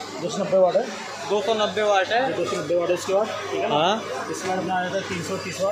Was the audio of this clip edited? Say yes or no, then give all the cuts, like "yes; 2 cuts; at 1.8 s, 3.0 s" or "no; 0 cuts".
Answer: no; 0 cuts